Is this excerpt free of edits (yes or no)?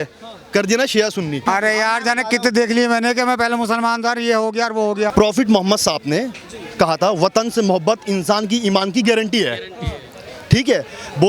no